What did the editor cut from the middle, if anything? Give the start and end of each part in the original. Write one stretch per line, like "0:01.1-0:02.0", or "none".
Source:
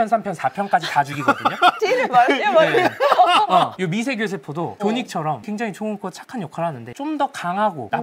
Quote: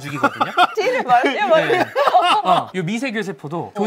none